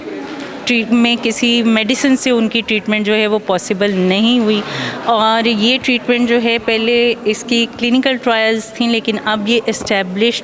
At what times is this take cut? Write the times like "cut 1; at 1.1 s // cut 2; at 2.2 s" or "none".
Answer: none